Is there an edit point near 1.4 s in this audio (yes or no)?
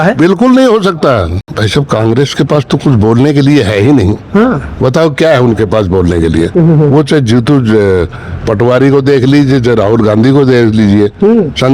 yes